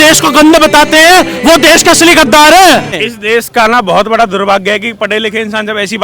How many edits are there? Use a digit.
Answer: 1